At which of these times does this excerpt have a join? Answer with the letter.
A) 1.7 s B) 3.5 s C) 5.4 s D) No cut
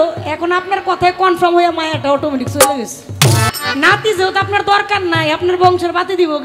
B